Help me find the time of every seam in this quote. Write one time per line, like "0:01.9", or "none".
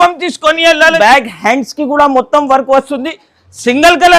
0:01.0

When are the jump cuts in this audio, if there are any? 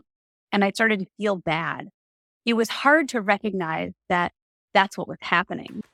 none

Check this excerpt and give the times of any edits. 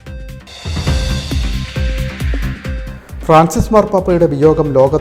none

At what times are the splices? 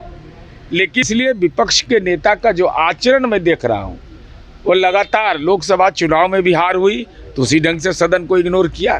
0:01.0

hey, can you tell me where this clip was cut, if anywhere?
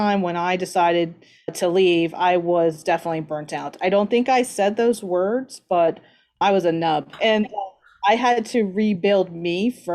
0:01.5
0:06.4
0:07.1

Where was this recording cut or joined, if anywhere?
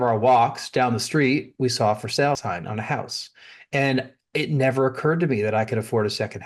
0:02.4

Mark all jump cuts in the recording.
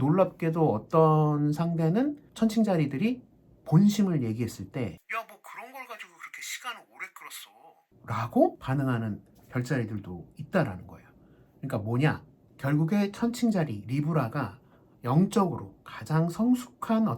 none

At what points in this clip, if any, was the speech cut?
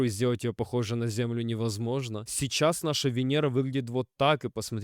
0:02.2

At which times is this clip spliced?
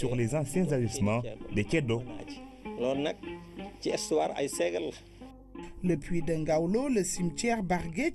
0:04.3

